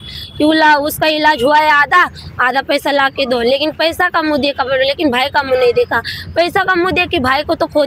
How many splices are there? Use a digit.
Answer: 0